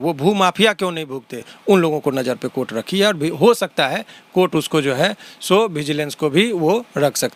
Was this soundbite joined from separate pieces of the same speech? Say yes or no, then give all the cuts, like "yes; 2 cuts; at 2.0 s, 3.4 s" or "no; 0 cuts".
no; 0 cuts